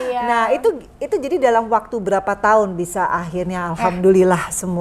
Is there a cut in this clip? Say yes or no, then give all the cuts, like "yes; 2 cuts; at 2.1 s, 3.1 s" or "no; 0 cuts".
no; 0 cuts